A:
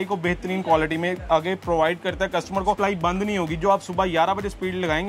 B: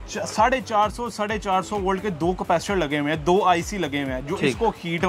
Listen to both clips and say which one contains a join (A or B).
A